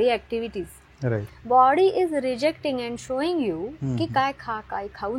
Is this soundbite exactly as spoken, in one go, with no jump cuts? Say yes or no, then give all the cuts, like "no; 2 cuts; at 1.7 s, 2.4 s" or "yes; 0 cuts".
no; 1 cut; at 1.3 s